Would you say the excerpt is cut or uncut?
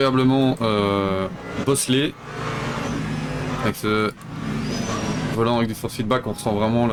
uncut